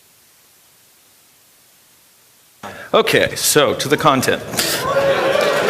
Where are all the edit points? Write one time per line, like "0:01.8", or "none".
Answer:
0:02.1